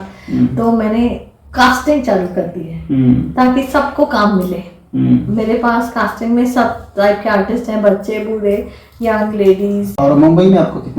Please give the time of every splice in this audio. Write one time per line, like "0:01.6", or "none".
0:09.9